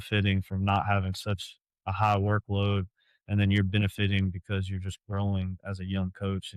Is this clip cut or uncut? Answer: uncut